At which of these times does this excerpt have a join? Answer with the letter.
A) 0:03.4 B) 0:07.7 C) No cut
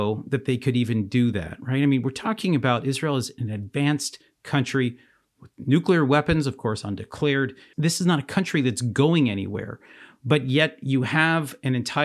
B